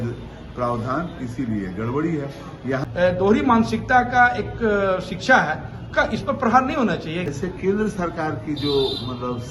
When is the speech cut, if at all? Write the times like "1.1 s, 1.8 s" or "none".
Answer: 2.8 s, 7.3 s